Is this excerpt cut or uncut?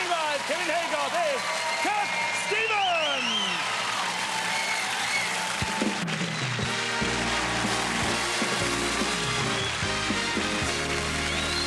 uncut